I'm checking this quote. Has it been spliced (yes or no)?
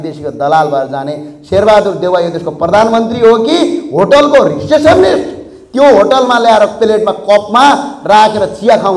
no